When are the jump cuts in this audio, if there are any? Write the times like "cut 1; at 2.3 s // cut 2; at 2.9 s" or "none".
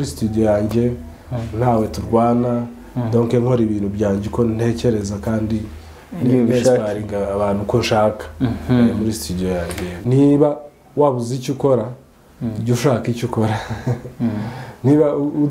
cut 1; at 9.9 s